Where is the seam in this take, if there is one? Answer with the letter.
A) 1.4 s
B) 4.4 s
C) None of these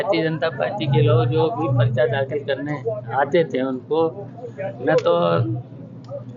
C